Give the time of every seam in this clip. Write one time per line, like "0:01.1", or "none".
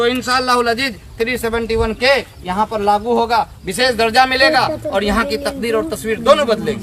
none